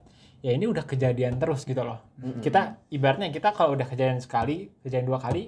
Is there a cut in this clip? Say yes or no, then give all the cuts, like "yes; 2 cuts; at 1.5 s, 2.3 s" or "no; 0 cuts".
no; 0 cuts